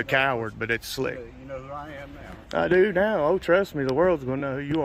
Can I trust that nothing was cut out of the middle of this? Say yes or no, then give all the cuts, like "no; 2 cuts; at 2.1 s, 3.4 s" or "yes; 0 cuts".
yes; 0 cuts